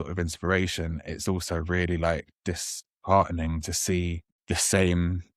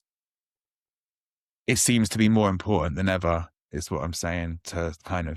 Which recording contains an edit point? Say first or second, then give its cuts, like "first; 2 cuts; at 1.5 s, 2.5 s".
first; 1 cut; at 4.3 s